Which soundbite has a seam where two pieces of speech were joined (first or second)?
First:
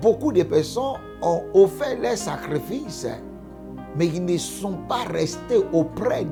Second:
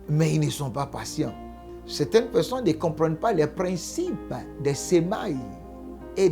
second